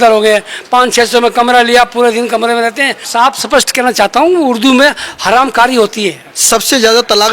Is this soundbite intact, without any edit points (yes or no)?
no